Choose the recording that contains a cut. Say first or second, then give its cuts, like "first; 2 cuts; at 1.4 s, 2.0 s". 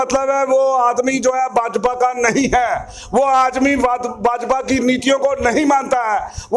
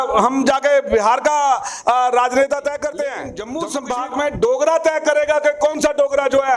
second; 1 cut; at 3.5 s